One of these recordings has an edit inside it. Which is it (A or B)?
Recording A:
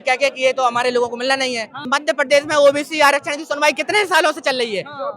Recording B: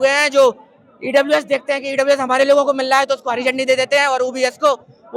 A